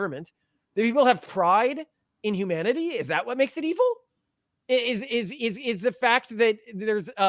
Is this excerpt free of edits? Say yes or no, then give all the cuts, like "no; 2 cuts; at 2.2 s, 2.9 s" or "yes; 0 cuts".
yes; 0 cuts